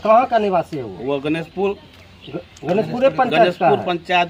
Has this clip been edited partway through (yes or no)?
no